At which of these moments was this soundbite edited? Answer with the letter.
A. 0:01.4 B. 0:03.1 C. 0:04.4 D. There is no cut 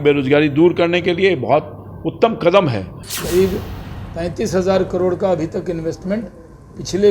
B